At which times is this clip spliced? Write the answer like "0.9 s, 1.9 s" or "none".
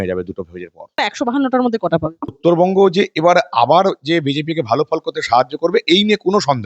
1.0 s, 2.4 s